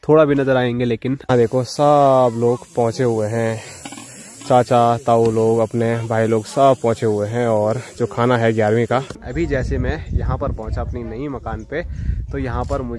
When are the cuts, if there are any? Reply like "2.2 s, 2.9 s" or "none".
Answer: 1.3 s, 9.2 s